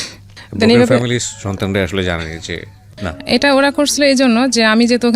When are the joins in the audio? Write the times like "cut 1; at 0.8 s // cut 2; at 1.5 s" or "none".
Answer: cut 1; at 3.1 s